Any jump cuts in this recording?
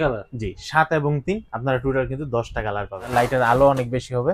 yes; 1 cut; at 3.0 s

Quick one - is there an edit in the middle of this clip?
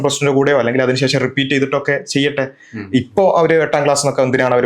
no; 0 cuts

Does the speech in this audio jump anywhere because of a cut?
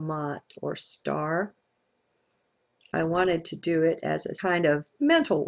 no; 0 cuts

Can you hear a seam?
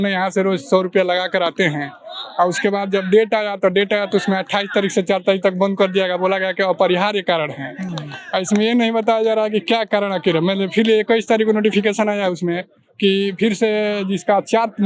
no; 0 cuts

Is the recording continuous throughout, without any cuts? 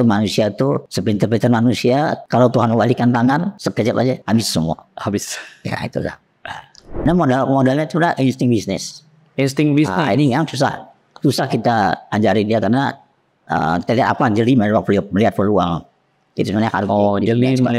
no; 4 cuts; at 0.9 s, 2.2 s, 4.0 s, 7.0 s

